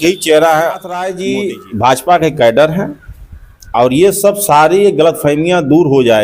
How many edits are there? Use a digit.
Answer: 1